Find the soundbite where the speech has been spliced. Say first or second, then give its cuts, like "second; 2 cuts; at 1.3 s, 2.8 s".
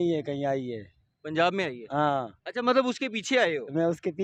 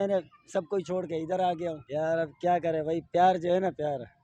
second; 1 cut; at 1.8 s